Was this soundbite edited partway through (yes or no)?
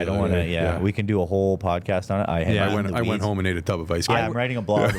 no